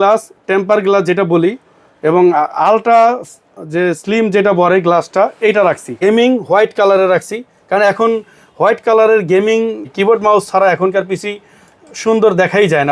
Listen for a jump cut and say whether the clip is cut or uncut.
cut